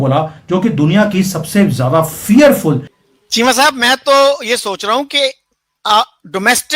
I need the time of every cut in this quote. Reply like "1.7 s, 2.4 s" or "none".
2.9 s